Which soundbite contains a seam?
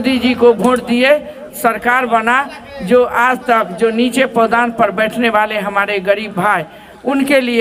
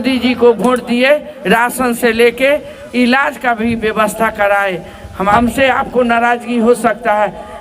second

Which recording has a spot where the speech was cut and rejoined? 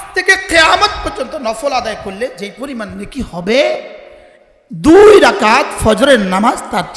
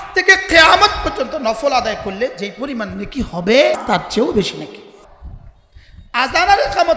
second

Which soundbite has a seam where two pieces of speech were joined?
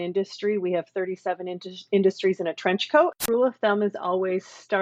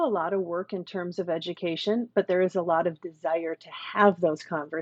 first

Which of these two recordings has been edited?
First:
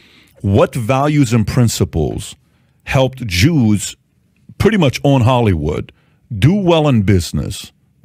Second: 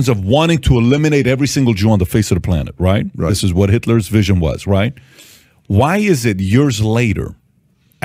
second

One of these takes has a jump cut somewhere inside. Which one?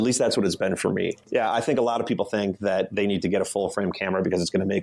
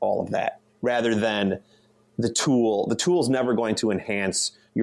first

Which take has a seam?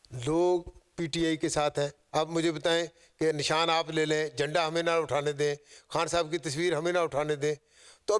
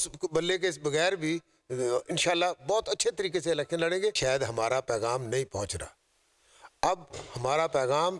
second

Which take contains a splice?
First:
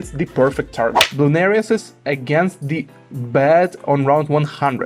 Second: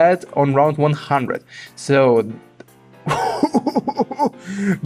first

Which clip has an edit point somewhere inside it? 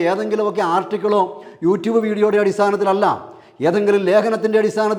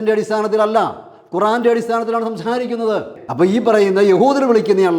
second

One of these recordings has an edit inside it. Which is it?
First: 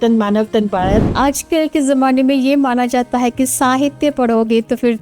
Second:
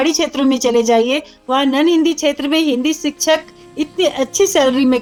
first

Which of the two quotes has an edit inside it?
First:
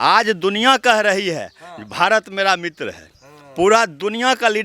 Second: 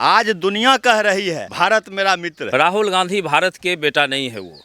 second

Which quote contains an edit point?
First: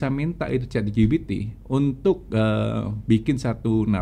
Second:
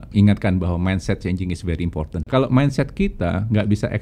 second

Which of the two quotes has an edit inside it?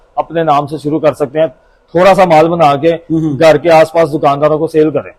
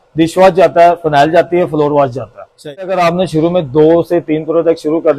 second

